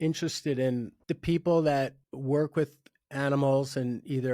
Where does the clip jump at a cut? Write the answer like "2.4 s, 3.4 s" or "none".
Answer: 0.9 s, 2.1 s